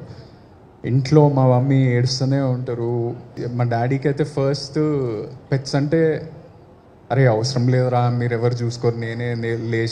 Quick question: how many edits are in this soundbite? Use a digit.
1